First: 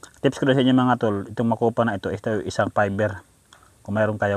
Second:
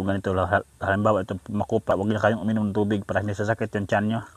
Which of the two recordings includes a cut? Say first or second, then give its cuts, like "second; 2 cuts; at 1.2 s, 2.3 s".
second; 1 cut; at 1.9 s